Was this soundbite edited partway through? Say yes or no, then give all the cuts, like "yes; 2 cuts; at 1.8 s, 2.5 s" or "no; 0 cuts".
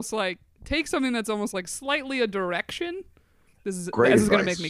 yes; 1 cut; at 3.5 s